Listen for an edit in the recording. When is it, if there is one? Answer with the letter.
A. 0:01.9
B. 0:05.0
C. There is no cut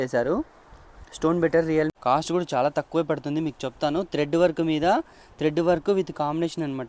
A